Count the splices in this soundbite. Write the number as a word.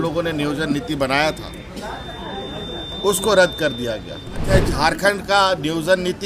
one